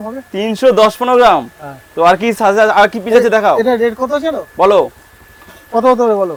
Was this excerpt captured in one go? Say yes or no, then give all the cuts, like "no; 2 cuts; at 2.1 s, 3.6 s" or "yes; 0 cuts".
yes; 0 cuts